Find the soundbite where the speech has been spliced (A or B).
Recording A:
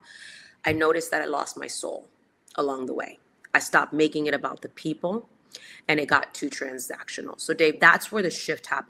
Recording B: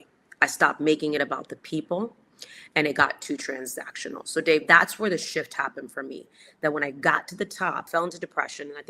B